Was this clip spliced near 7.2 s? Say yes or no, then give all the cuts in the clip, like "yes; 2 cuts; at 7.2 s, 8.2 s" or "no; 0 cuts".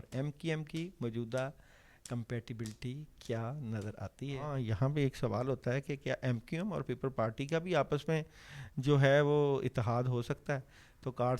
no; 1 cut; at 4.3 s